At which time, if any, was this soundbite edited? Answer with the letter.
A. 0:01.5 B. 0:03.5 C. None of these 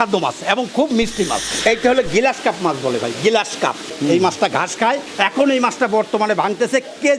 A